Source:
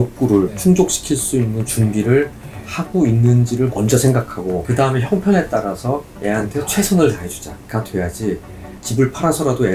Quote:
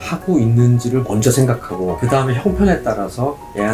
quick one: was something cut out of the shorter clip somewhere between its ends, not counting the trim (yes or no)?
no